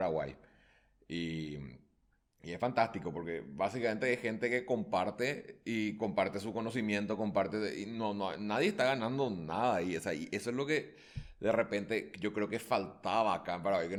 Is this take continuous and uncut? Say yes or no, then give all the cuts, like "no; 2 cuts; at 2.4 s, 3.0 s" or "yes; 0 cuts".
yes; 0 cuts